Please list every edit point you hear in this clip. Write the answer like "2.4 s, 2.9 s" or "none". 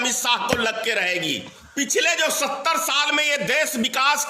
1.6 s